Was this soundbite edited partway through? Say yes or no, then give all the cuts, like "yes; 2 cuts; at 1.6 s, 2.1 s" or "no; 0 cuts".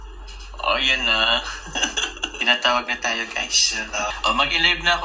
yes; 2 cuts; at 2.3 s, 4.2 s